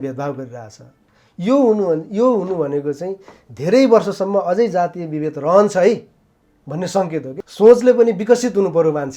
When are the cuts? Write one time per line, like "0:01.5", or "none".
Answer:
0:07.4